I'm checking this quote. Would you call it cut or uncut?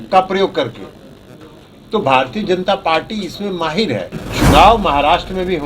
cut